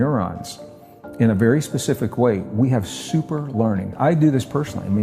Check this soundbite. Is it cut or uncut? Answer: cut